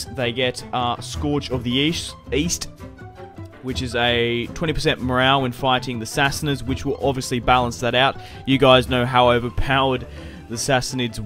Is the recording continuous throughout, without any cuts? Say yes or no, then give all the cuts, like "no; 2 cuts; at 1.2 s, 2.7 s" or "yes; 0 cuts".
no; 1 cut; at 4.5 s